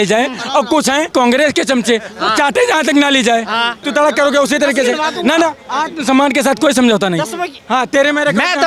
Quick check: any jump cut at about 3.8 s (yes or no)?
yes